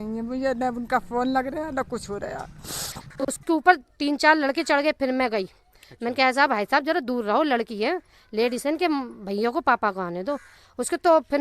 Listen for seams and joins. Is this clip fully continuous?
no; 1 cut; at 3.4 s

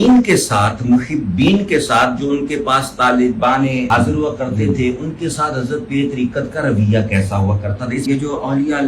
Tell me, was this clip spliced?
yes; 2 cuts; at 3.9 s, 8.0 s

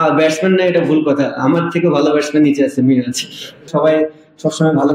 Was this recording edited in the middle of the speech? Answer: yes; 1 cut; at 3.7 s

